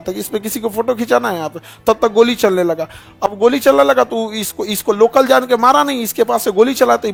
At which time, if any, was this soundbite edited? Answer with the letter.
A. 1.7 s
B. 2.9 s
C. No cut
C